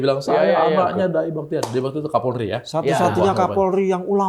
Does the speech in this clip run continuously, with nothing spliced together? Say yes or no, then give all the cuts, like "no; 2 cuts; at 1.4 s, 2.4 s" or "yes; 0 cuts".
no; 1 cut; at 2.6 s